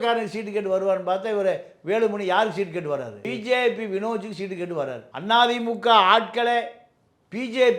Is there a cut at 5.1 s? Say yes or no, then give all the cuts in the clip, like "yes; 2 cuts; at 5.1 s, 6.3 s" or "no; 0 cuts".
yes; 2 cuts; at 3.2 s, 5.1 s